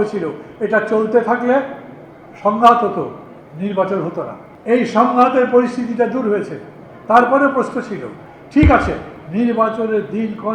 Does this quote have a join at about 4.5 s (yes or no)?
yes